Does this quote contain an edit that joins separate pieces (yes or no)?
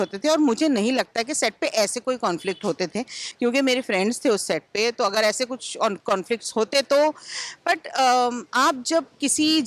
no